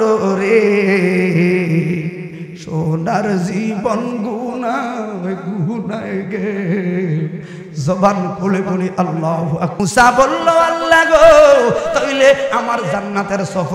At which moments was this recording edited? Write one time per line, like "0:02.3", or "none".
0:09.8